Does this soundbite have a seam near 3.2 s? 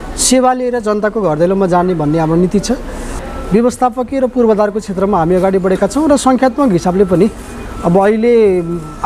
yes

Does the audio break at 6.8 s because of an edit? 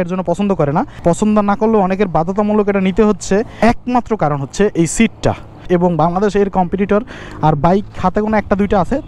no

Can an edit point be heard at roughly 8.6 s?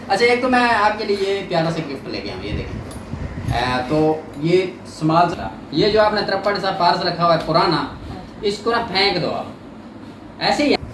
no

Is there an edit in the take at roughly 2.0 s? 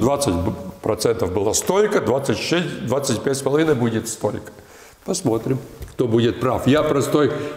no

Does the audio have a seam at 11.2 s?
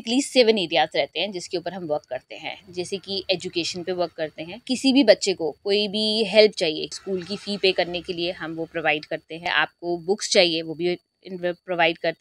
no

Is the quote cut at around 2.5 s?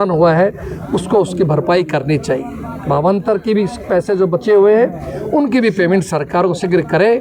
no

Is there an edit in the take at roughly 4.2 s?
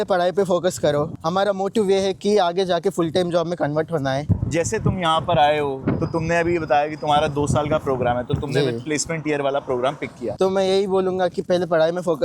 yes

